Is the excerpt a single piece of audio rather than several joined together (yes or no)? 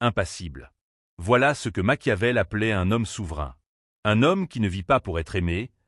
no